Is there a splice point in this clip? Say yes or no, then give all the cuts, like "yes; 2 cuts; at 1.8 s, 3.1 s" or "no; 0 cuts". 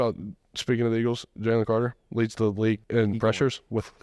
yes; 1 cut; at 2.8 s